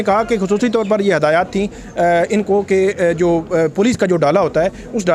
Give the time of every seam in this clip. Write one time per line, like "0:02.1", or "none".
none